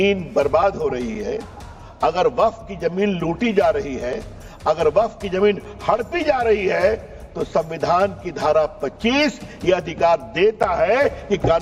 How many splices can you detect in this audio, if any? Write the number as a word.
zero